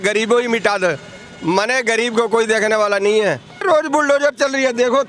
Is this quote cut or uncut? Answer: cut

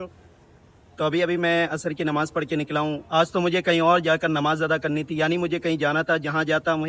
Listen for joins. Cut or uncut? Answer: uncut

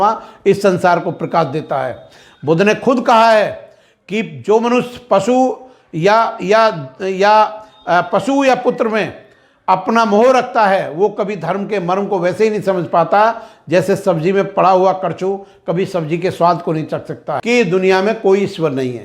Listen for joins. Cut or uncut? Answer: cut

